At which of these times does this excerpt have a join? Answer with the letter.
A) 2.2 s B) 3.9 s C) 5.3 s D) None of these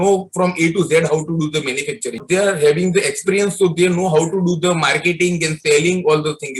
A